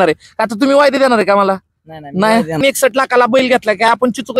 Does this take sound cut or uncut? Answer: cut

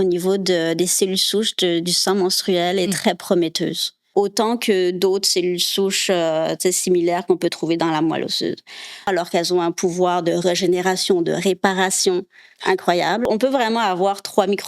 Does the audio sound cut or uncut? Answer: cut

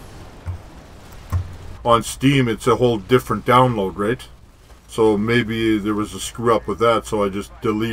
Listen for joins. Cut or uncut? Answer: cut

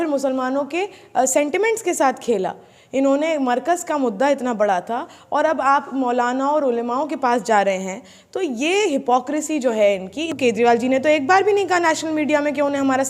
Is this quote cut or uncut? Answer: cut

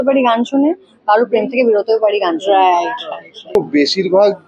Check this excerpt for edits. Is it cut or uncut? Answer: cut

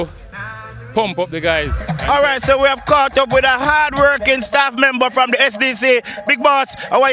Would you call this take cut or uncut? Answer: cut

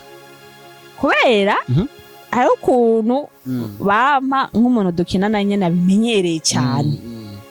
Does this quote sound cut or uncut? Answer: uncut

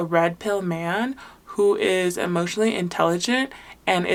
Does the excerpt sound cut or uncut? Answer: uncut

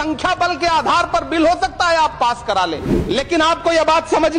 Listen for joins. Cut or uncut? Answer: cut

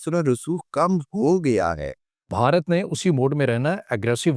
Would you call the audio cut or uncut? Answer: cut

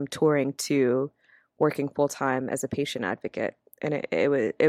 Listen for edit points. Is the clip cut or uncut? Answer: uncut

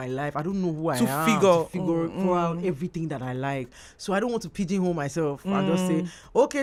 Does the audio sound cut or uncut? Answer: uncut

